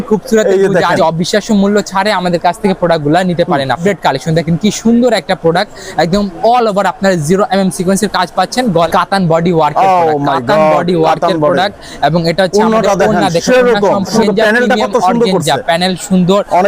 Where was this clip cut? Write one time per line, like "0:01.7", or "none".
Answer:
0:01.0
0:03.8
0:08.9
0:14.2